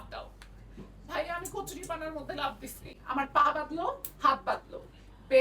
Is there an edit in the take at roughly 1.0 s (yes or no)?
no